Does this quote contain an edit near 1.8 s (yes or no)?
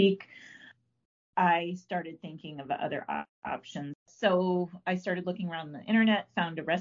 no